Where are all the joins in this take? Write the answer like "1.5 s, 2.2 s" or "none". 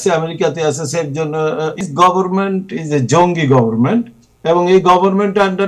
1.9 s